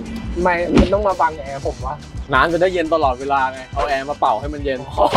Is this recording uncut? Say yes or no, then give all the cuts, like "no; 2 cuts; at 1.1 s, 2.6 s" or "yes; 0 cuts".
yes; 0 cuts